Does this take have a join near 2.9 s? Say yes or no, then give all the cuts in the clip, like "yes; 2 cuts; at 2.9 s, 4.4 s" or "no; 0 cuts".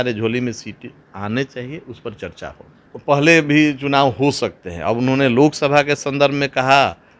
yes; 1 cut; at 2.9 s